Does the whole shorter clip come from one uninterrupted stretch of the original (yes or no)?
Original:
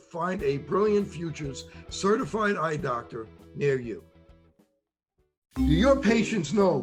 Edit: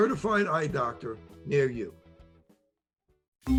yes